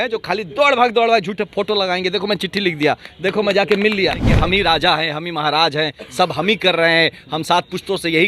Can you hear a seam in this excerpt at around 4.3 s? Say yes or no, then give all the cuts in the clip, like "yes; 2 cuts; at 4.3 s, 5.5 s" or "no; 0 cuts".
yes; 1 cut; at 4.3 s